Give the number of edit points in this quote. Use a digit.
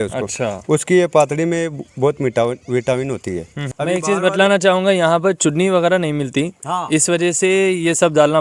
1